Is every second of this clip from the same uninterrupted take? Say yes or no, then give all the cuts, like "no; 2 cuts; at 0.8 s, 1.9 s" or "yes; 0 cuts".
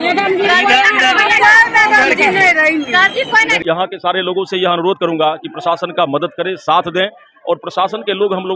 no; 1 cut; at 3.6 s